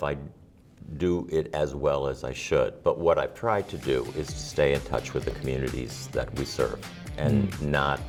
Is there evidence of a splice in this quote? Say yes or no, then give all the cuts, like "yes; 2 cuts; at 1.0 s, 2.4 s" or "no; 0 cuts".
no; 0 cuts